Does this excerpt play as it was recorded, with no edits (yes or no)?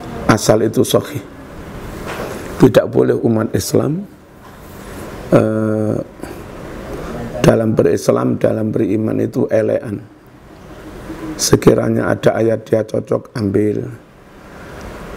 yes